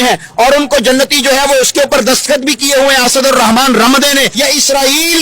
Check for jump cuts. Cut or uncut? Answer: cut